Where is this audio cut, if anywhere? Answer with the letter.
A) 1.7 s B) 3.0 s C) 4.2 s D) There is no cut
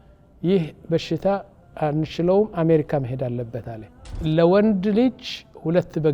C